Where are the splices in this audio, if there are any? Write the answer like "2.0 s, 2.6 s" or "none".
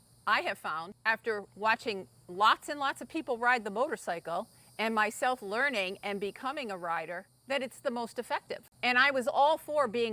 0.9 s, 7.3 s, 8.6 s